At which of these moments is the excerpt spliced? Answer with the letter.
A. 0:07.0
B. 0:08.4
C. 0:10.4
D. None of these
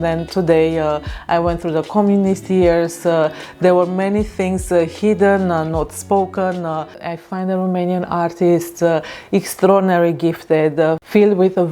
A